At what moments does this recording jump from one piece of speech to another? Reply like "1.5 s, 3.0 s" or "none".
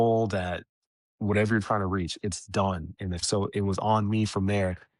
3.2 s

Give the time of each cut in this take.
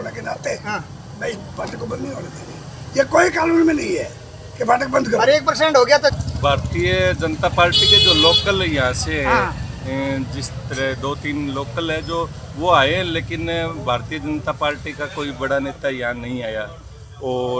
5.9 s

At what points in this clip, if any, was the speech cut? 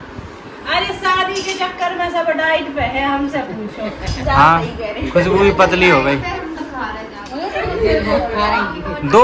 none

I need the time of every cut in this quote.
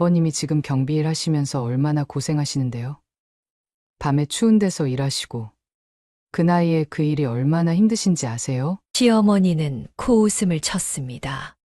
none

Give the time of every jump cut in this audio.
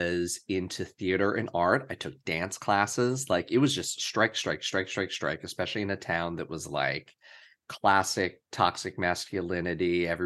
none

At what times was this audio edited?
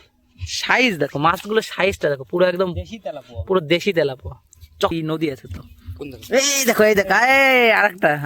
4.9 s

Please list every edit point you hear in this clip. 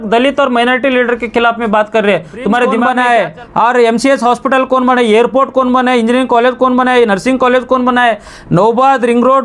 2.8 s

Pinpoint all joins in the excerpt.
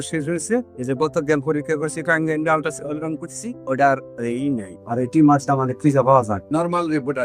none

